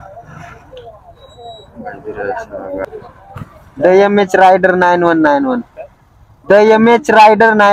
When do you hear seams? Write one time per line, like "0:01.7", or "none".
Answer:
0:02.8